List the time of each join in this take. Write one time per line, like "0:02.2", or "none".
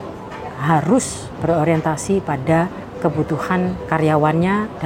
0:02.8
0:03.8